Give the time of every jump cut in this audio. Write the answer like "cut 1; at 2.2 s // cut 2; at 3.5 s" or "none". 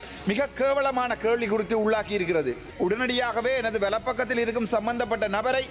cut 1; at 2.7 s